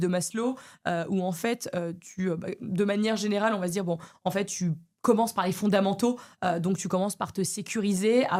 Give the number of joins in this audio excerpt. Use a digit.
0